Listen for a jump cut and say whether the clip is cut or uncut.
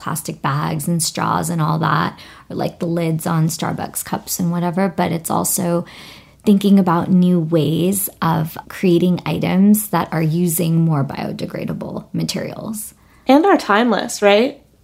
uncut